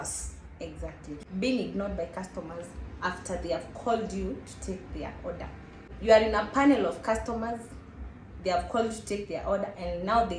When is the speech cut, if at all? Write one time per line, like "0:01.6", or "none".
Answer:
0:01.1
0:05.9